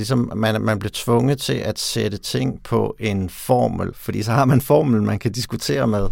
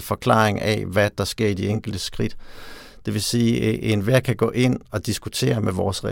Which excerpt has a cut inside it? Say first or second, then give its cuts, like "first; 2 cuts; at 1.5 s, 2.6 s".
first; 1 cut; at 3.9 s